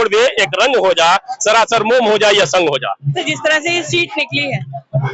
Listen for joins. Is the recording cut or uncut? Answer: cut